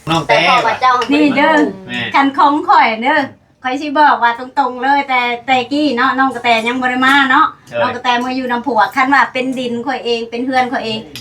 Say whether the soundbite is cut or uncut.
cut